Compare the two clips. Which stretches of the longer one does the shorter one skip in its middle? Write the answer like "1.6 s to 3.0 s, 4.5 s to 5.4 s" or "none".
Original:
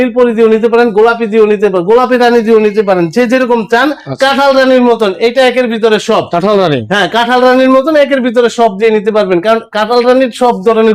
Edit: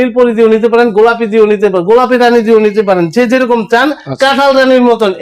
none